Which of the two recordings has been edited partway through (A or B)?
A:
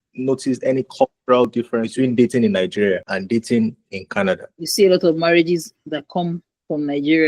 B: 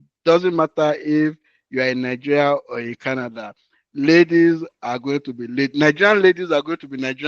A